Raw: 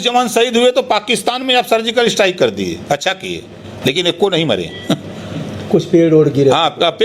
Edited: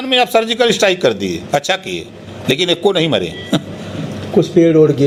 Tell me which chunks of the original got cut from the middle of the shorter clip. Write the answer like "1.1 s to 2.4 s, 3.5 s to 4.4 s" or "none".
none

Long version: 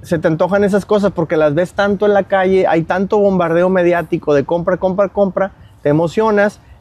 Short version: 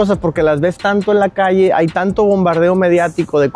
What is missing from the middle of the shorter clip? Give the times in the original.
none

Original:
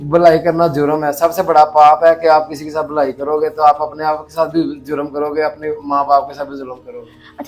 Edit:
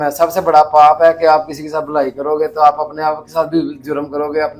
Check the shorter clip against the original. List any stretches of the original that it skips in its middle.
none

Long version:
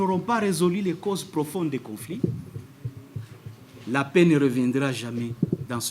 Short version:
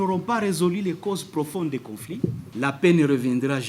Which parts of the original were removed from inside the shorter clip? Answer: 2.4 s to 3.7 s

